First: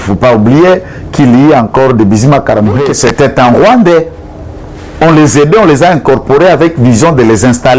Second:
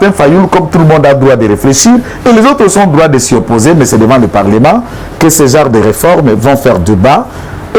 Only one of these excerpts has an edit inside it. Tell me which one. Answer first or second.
first